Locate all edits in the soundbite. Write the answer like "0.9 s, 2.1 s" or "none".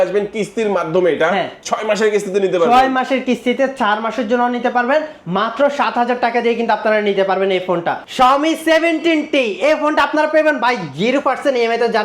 8.1 s